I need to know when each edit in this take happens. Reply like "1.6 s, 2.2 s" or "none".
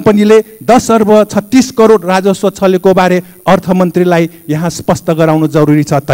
none